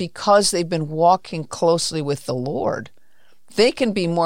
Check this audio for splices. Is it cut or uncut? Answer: uncut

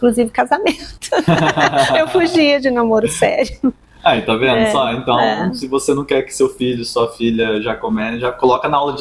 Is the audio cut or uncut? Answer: uncut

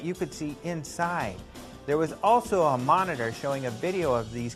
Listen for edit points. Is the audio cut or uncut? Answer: uncut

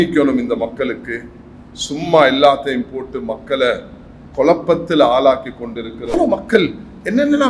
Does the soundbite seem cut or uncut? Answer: cut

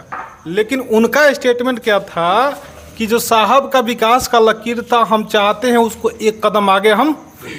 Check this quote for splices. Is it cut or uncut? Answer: uncut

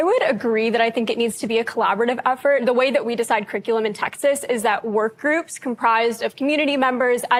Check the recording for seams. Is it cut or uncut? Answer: uncut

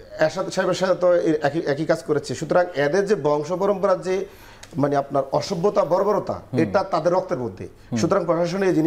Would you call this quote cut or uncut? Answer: uncut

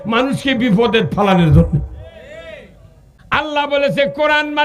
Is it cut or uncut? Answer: cut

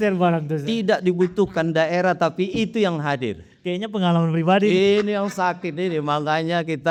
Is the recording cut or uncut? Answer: uncut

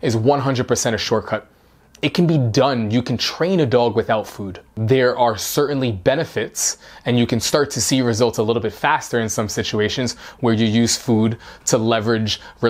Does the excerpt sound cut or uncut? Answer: uncut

